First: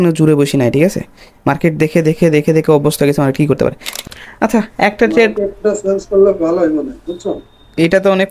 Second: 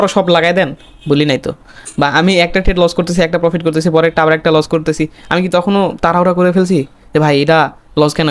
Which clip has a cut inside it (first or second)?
first